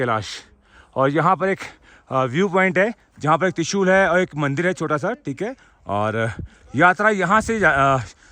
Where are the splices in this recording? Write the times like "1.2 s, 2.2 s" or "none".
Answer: none